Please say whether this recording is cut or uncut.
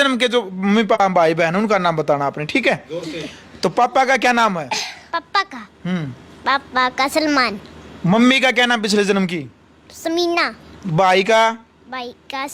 cut